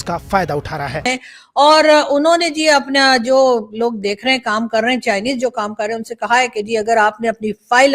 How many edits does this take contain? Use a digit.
1